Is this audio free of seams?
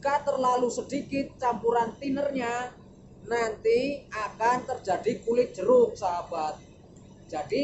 yes; 0 cuts

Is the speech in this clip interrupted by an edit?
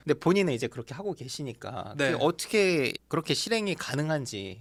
no; 0 cuts

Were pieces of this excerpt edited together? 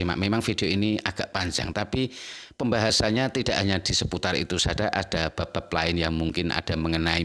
no; 0 cuts

